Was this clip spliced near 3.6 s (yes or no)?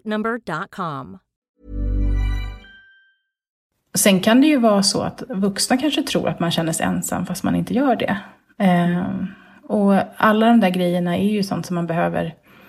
yes